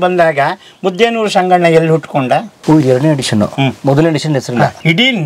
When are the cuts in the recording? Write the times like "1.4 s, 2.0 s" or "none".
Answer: none